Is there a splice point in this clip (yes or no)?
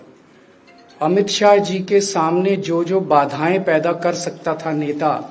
no